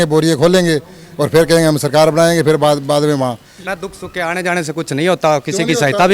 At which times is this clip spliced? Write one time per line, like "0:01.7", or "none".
0:03.6